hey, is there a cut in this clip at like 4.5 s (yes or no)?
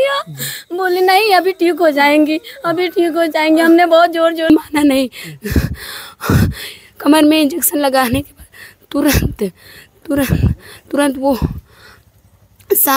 yes